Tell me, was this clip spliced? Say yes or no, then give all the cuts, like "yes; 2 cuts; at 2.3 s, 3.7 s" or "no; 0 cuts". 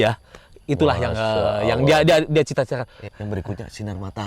yes; 1 cut; at 3.1 s